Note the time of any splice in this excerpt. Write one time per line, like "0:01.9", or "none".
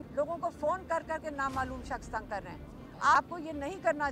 0:03.2